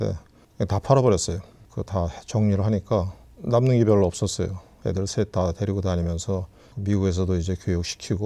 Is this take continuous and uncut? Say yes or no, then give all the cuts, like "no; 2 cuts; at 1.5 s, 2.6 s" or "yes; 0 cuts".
yes; 0 cuts